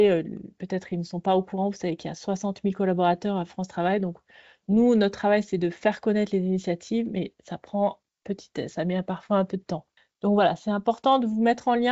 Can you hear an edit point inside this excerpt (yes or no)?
no